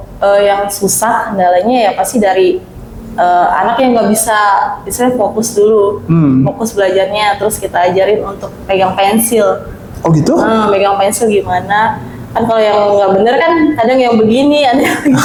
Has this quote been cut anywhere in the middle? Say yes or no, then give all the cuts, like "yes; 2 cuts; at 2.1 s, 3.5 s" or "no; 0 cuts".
no; 0 cuts